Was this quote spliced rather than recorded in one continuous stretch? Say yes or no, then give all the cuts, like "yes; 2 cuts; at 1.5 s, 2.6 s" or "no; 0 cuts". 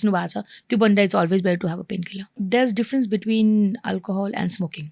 yes; 1 cut; at 2.3 s